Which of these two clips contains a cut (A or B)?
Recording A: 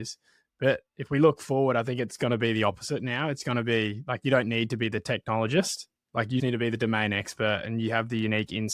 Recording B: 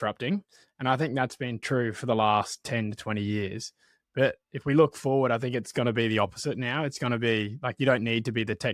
A